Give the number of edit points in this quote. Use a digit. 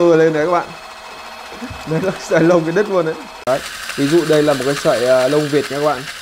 1